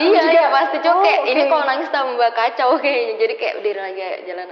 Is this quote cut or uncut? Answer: uncut